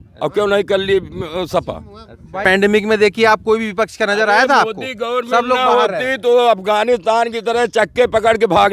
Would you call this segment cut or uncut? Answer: cut